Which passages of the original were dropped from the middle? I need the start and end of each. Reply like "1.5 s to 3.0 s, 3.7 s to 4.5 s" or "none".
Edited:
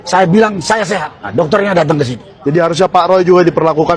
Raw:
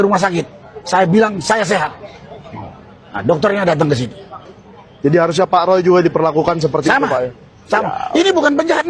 2.0 s to 3.1 s, 4.2 s to 4.8 s